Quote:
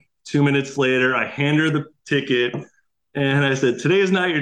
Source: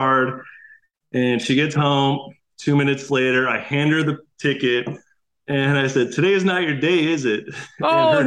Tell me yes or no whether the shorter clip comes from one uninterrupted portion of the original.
yes